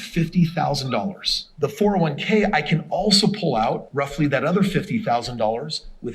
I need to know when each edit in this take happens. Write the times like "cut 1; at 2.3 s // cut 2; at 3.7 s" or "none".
cut 1; at 1.4 s

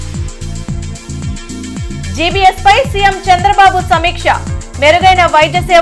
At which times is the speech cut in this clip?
cut 1; at 1.2 s

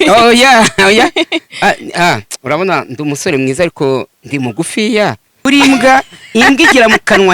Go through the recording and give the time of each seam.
cut 1; at 5.3 s

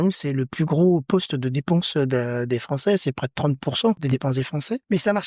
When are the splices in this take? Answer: cut 1; at 4.4 s

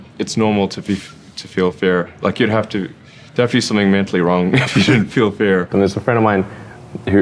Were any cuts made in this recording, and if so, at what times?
cut 1; at 5.7 s

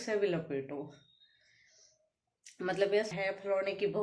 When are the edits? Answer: cut 1; at 3.1 s

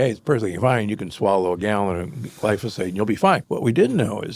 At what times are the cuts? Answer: cut 1; at 3.4 s

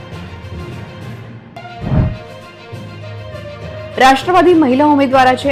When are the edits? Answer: none

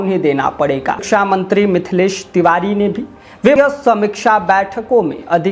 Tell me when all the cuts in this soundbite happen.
cut 1; at 1.0 s // cut 2; at 3.6 s

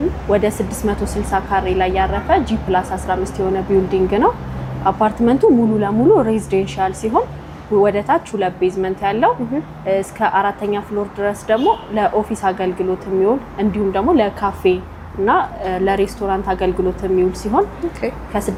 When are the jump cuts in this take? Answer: none

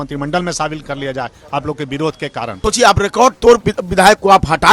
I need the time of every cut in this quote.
cut 1; at 2.5 s

